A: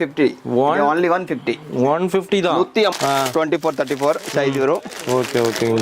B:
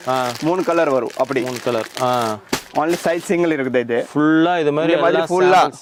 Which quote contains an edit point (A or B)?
A